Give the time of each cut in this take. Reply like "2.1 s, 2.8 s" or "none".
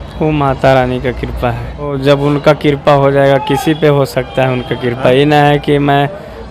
1.9 s